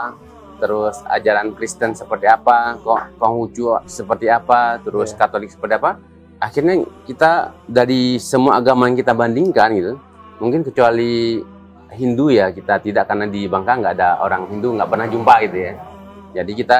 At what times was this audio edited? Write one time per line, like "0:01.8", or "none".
none